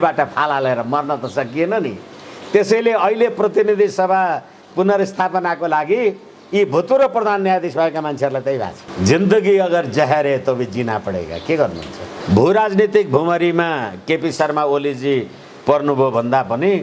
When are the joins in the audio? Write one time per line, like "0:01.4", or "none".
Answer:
0:08.8
0:12.1